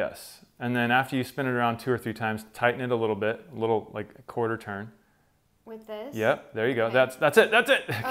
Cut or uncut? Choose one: uncut